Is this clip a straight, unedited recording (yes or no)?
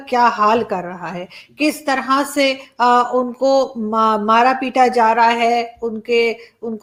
yes